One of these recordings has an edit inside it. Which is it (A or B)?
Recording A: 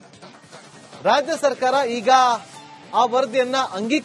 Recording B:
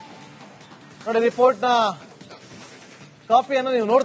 B